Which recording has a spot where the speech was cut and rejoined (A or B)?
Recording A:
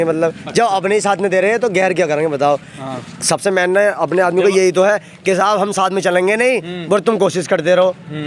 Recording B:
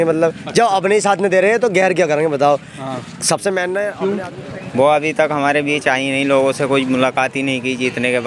B